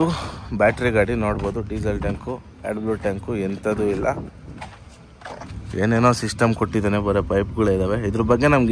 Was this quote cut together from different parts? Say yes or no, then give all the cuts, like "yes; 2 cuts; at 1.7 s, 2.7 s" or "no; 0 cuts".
no; 0 cuts